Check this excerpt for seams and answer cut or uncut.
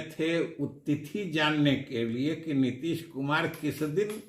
uncut